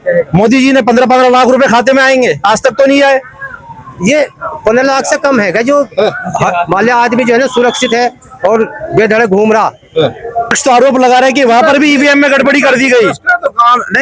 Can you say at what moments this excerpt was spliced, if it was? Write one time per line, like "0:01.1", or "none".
0:10.5

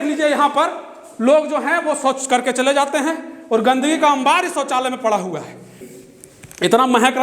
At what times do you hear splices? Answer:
0:05.8

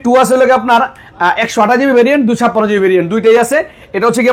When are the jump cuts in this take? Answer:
none

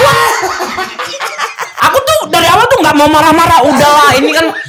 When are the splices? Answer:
0:01.6

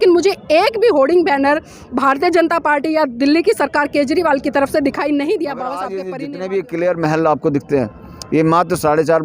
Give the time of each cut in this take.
0:05.9

